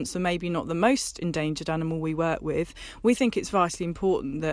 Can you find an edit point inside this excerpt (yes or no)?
no